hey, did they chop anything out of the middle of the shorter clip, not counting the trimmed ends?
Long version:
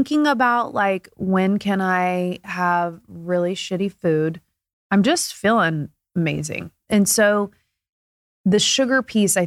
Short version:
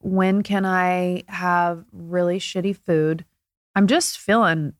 no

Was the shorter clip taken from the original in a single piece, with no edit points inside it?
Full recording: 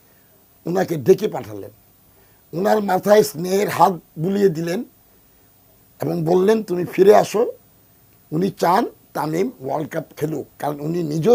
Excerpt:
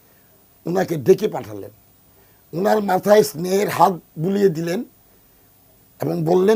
yes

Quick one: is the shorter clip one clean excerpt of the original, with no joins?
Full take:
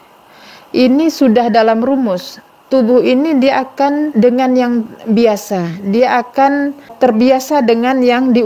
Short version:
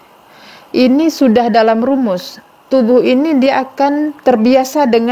no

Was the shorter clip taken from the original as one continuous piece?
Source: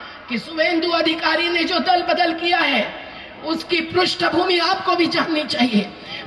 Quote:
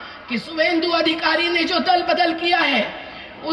yes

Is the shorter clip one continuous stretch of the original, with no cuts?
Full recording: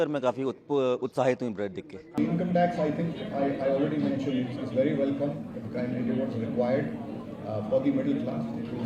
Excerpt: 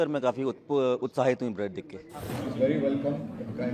no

